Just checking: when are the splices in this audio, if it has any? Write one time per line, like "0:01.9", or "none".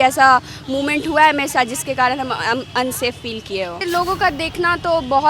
0:03.8